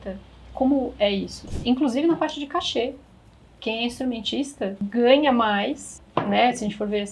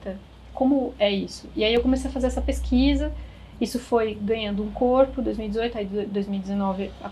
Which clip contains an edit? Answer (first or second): first